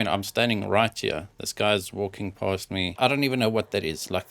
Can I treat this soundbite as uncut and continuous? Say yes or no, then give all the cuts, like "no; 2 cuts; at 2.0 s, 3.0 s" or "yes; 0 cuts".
no; 1 cut; at 2.9 s